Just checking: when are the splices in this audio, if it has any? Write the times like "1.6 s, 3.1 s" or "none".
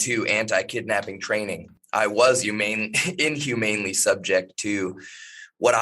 1.7 s